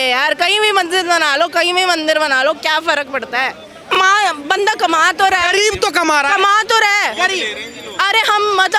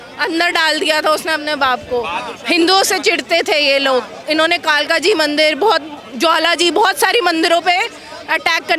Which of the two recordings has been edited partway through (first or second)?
first